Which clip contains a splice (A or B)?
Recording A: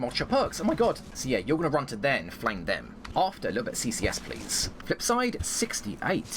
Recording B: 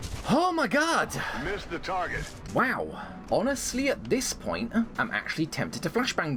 A